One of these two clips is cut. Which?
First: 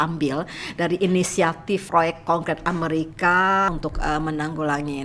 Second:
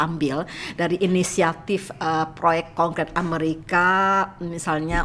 first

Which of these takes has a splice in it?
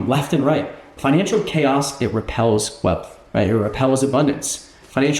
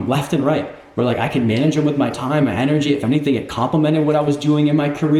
first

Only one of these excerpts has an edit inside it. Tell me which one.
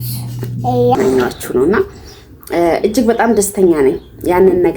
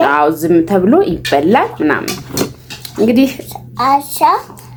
first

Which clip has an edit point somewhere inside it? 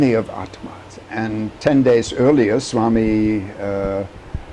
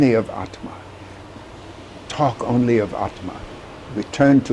first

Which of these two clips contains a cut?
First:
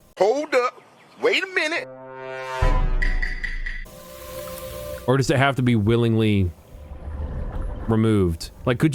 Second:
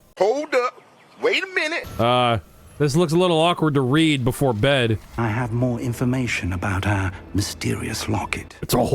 second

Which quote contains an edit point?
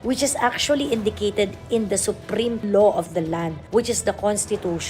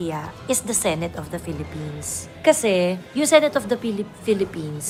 first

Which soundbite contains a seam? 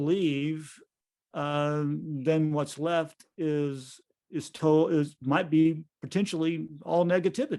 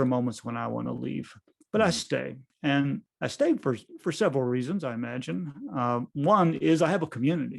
second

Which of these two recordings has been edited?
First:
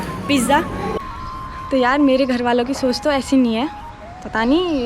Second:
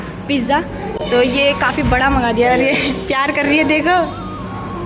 first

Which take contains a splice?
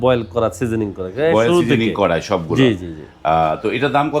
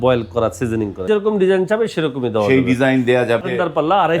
second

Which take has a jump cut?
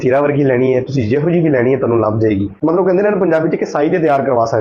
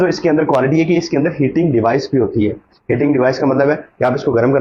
first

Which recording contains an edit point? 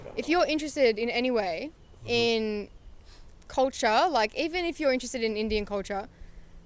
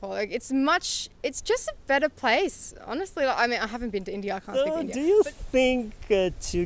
second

